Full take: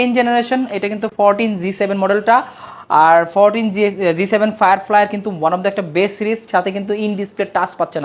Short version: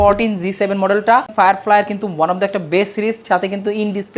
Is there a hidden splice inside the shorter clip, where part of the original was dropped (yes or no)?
yes